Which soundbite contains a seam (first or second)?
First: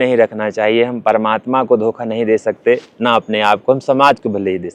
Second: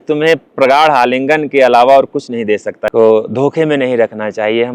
second